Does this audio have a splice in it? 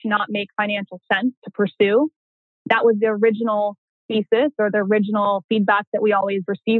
no; 0 cuts

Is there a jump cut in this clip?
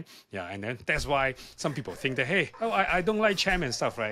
yes; 1 cut; at 2.5 s

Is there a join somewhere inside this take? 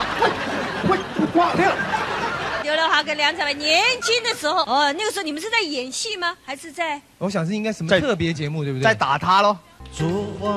yes; 2 cuts; at 2.6 s, 9.7 s

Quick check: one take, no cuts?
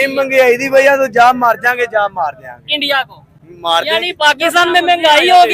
yes; 0 cuts

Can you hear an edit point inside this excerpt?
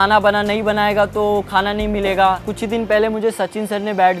yes; 1 cut; at 2.5 s

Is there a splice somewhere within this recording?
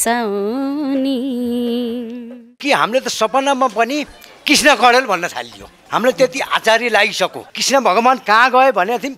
yes; 2 cuts; at 2.6 s, 7.5 s

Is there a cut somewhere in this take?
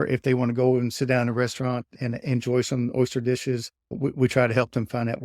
yes; 2 cuts; at 1.9 s, 3.9 s

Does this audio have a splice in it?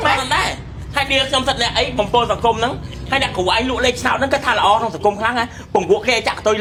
no; 0 cuts

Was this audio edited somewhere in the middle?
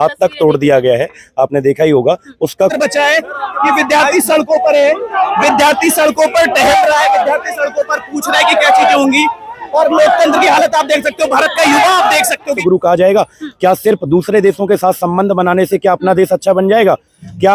yes; 2 cuts; at 2.7 s, 12.6 s

